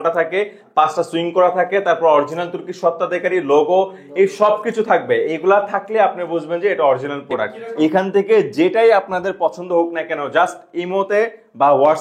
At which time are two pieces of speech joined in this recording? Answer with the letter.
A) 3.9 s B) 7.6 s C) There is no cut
B